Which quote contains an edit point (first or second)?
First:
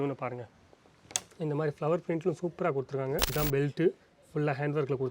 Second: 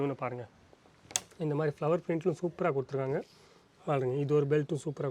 first